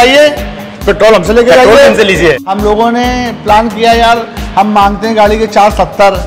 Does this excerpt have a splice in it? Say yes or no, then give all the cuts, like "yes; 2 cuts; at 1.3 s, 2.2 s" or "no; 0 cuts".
yes; 1 cut; at 2.4 s